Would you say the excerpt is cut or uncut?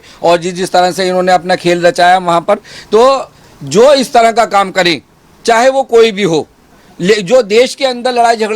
uncut